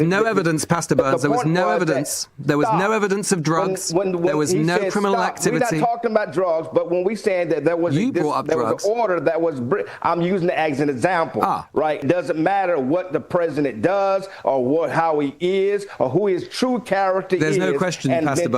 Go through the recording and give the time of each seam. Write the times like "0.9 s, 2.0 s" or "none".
12.0 s